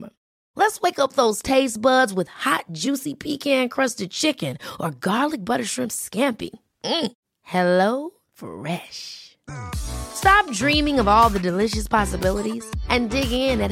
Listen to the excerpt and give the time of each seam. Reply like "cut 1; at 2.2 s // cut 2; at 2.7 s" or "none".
none